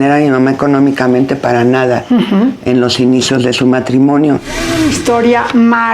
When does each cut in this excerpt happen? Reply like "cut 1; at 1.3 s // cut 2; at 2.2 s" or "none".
cut 1; at 4.7 s